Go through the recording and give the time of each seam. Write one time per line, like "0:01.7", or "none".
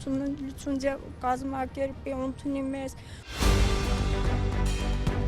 0:03.2